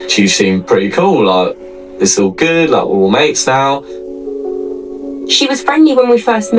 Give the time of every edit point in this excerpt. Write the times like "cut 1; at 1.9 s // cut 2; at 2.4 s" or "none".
none